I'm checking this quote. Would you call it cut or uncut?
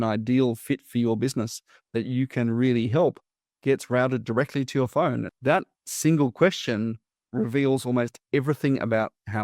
cut